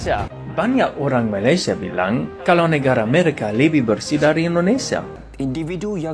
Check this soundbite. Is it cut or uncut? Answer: cut